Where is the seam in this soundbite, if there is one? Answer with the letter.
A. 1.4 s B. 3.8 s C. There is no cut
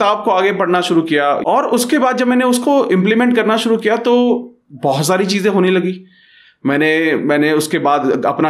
A